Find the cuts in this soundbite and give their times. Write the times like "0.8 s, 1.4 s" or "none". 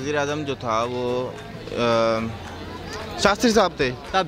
none

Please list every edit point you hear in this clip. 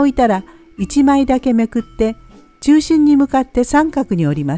none

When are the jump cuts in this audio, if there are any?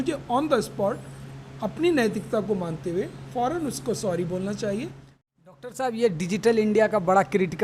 5.0 s

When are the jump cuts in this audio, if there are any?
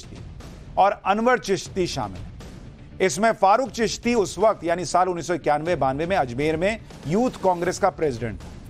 none

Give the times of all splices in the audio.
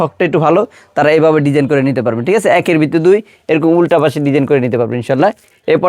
none

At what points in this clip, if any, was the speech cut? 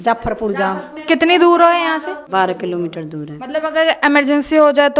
2.2 s

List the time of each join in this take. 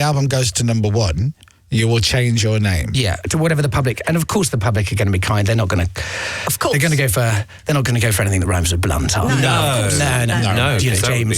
3.2 s

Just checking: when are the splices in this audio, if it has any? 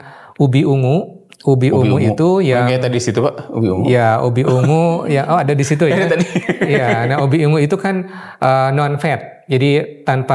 none

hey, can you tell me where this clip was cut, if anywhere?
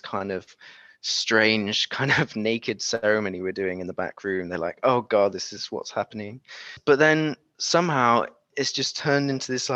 6.7 s

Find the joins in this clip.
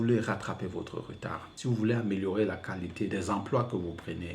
1.5 s, 3.1 s

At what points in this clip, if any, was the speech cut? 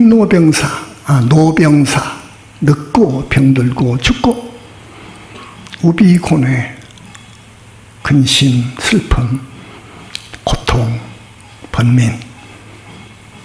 none

